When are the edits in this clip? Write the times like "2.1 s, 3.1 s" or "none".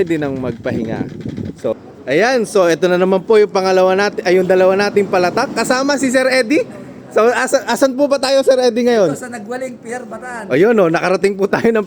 1.7 s